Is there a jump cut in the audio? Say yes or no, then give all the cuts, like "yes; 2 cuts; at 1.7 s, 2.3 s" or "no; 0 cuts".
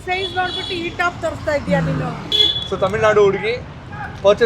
yes; 1 cut; at 2.2 s